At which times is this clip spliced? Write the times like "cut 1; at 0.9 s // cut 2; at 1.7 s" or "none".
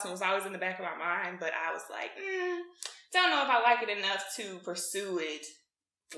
none

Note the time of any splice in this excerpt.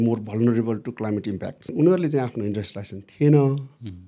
cut 1; at 1.7 s

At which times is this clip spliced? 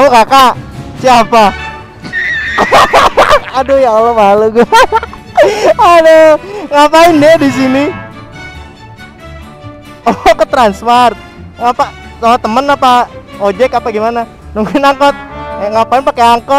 none

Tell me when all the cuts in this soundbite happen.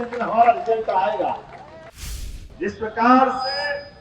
cut 1; at 1.9 s

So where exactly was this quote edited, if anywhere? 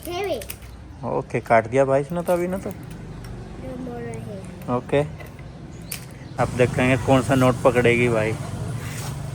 cut 1; at 6.3 s

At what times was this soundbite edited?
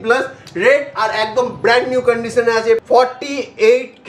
cut 1; at 2.8 s

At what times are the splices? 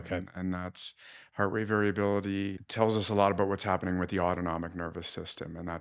cut 1; at 2.6 s

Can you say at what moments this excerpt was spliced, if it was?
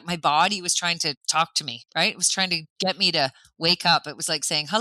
cut 1; at 1.2 s // cut 2; at 2.6 s

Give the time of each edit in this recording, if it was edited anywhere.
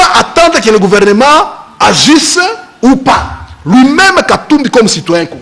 none

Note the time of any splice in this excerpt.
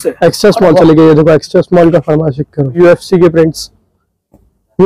cut 1; at 2.8 s

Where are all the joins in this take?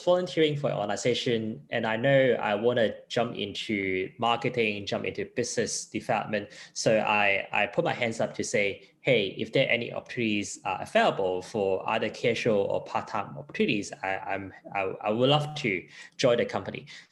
none

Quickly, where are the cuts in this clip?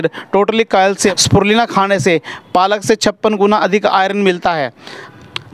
cut 1; at 1.2 s

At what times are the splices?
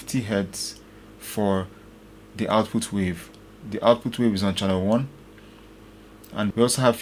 none

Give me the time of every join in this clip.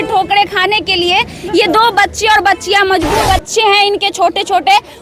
cut 1; at 3.2 s

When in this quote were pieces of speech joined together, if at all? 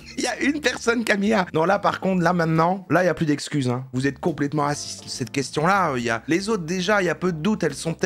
cut 1; at 1.5 s // cut 2; at 5.1 s

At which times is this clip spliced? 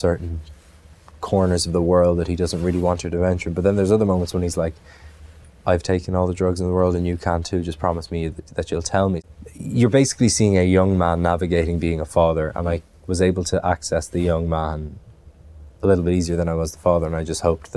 cut 1; at 9.2 s

